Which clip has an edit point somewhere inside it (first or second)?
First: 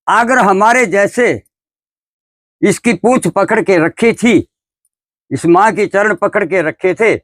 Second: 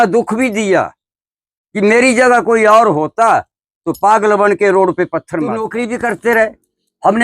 second